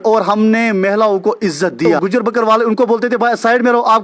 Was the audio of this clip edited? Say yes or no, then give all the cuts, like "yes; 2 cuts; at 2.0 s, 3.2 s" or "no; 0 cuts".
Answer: yes; 1 cut; at 2.0 s